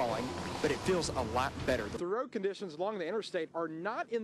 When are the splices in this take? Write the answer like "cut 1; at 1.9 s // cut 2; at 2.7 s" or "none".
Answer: cut 1; at 1.9 s